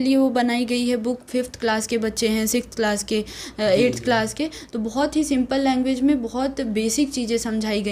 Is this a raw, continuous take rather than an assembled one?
yes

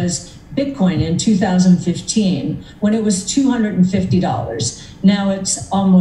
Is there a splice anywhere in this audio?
no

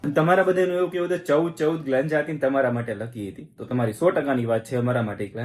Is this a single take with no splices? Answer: yes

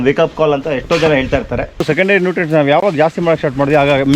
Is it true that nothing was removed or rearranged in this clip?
no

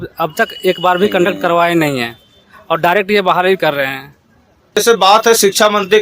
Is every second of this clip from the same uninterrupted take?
no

